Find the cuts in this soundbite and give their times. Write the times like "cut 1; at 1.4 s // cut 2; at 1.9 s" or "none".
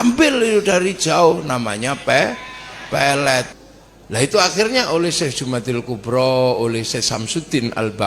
cut 1; at 3.5 s